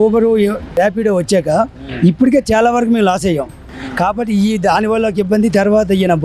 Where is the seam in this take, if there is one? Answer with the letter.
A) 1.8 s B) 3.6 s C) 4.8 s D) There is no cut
B